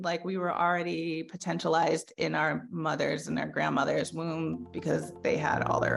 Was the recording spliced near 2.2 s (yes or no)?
no